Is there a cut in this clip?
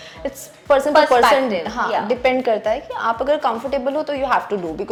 no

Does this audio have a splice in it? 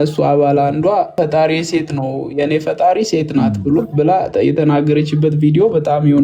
yes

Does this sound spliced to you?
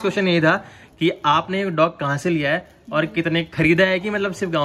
no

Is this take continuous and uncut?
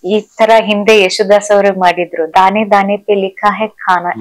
no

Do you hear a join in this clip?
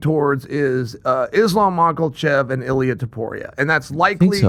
no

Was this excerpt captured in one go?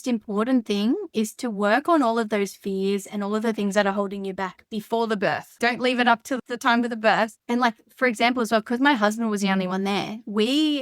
no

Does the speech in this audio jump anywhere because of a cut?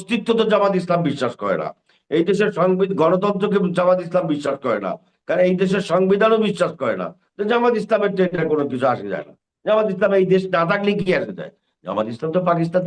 no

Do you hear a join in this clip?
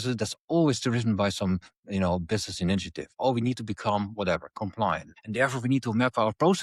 yes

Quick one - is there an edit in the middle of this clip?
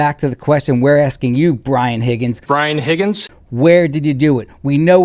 no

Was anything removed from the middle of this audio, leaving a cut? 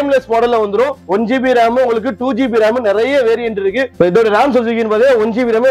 yes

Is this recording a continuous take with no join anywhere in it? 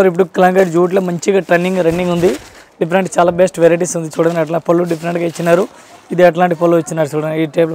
yes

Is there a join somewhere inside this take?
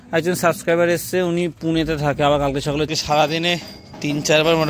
yes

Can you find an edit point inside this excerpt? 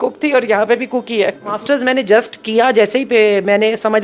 yes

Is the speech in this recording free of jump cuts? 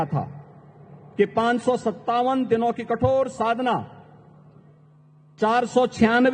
yes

